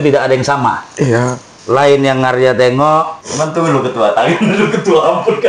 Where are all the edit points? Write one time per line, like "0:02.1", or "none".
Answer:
0:01.5
0:03.2